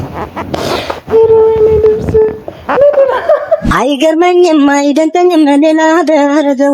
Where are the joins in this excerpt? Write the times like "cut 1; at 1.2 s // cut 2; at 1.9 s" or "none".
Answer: cut 1; at 3.6 s